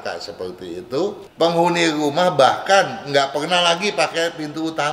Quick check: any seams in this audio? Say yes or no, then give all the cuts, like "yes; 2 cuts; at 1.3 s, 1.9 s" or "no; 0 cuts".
yes; 1 cut; at 1.2 s